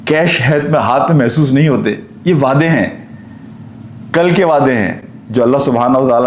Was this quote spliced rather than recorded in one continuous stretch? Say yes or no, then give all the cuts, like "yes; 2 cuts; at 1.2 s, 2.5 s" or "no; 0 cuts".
no; 0 cuts